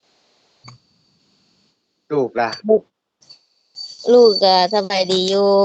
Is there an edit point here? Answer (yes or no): no